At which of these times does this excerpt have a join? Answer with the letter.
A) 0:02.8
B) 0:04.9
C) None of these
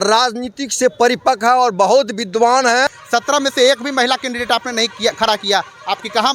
A